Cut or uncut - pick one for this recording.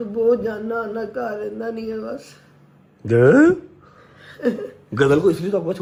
uncut